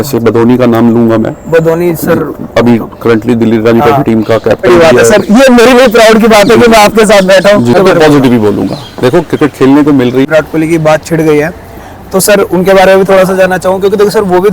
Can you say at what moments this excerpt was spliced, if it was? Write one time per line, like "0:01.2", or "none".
0:04.7
0:07.7
0:10.3